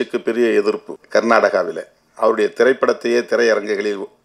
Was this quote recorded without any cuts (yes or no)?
no